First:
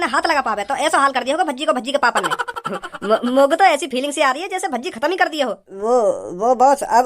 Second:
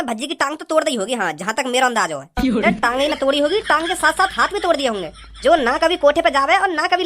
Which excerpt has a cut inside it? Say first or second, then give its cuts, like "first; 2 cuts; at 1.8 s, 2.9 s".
first; 1 cut; at 5.7 s